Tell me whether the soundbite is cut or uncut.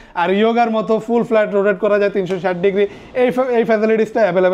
uncut